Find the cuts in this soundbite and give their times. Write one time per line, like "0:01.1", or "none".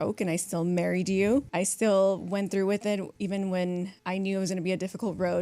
0:01.5
0:03.1
0:04.0